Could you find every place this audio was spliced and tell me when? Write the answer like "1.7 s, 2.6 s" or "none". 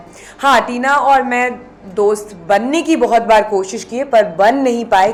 none